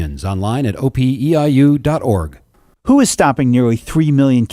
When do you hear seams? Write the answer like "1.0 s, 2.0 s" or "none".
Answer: 2.4 s

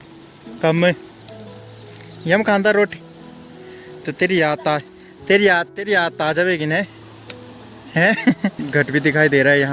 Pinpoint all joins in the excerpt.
8.6 s

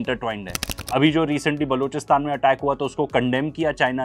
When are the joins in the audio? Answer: none

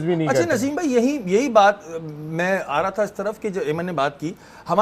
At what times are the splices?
none

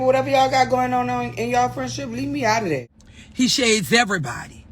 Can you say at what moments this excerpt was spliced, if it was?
3.0 s

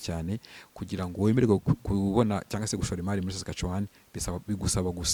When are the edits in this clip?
none

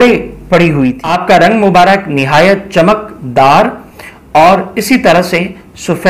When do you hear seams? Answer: 1.1 s

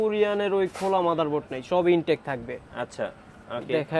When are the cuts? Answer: none

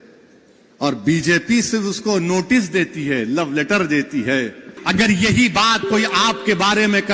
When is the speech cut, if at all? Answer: 4.8 s

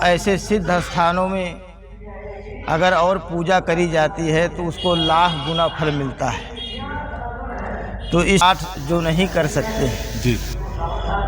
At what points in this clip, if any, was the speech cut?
8.4 s

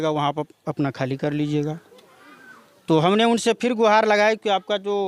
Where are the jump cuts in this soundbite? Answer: none

